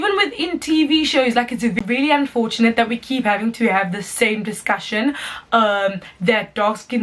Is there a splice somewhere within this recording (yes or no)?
yes